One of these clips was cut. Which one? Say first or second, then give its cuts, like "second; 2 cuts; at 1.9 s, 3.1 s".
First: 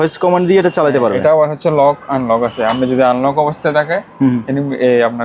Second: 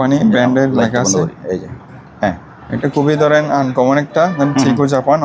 second; 1 cut; at 2.8 s